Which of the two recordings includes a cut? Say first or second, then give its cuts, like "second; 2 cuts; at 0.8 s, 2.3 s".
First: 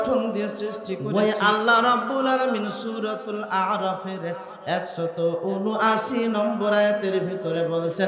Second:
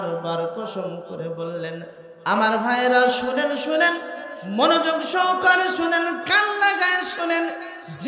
first; 1 cut; at 1.0 s